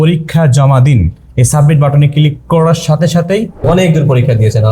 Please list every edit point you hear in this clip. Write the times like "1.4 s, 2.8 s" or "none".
3.6 s